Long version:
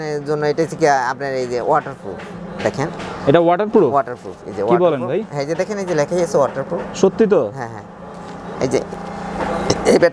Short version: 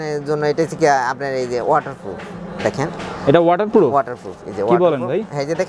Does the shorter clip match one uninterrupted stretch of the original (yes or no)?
yes